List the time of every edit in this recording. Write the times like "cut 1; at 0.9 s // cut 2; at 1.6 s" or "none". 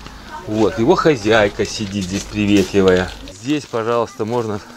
cut 1; at 3.4 s